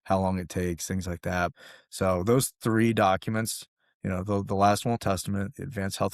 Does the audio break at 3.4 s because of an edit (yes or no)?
no